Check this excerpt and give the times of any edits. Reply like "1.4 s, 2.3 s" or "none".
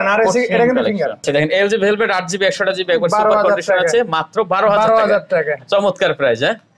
1.2 s